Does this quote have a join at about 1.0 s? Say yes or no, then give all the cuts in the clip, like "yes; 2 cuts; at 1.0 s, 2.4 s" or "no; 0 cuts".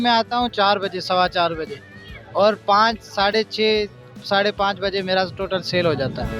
no; 0 cuts